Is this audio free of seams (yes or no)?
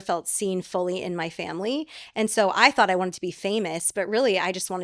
yes